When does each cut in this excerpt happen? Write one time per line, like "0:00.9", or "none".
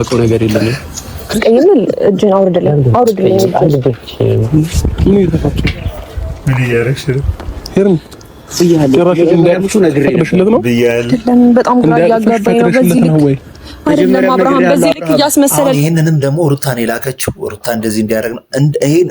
0:01.4